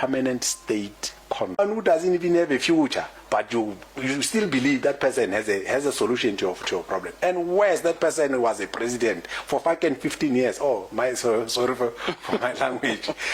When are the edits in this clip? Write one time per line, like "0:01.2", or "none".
0:01.6